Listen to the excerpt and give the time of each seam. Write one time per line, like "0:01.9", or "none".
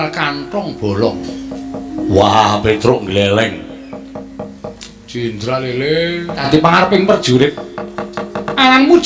0:06.4